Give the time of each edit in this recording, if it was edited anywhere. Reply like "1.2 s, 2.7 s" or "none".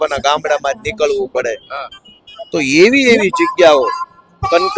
none